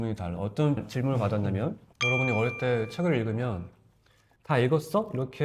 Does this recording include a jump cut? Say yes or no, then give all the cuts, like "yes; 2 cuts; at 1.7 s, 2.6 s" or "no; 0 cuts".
yes; 1 cut; at 1.9 s